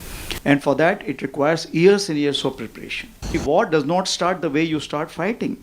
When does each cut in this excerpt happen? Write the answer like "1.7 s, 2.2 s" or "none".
3.3 s

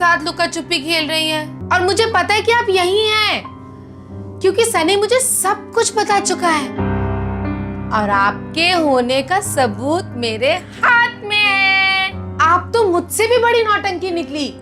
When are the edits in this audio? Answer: 1.5 s

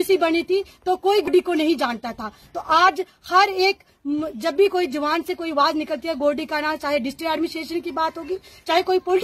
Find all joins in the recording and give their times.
1.3 s

